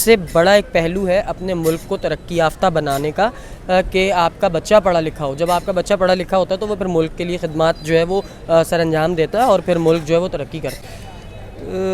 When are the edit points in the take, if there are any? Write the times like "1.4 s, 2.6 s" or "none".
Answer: 10.9 s